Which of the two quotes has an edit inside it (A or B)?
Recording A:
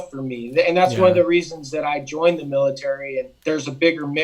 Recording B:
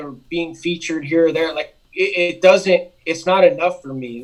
A